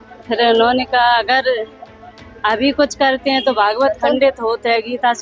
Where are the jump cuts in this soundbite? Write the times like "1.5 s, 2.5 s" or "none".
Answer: none